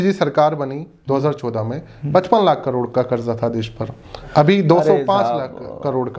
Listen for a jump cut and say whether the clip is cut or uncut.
uncut